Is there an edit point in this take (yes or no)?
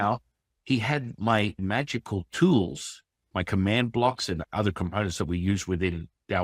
yes